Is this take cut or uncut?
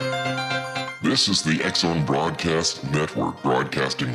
cut